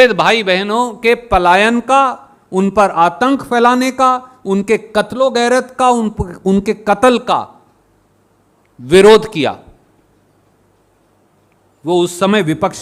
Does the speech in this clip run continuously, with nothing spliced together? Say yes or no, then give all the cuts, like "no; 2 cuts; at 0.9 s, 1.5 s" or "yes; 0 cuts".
yes; 0 cuts